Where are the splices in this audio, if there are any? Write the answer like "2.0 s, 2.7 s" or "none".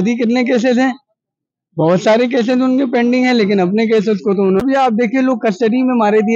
4.6 s